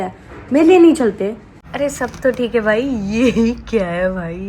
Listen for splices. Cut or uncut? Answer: cut